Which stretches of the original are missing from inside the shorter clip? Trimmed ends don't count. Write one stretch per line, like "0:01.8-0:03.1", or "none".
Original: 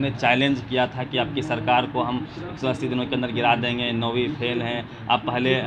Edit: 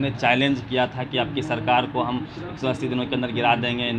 none